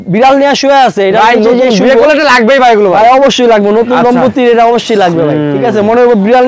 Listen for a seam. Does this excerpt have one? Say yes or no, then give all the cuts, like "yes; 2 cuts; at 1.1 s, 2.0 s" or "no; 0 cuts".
no; 0 cuts